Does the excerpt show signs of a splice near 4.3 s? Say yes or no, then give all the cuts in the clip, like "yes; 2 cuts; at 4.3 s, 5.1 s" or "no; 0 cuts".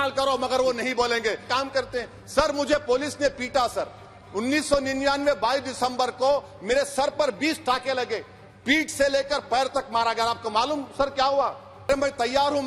no; 2 cuts; at 1.5 s, 11.9 s